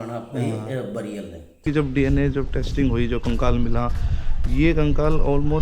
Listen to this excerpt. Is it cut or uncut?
cut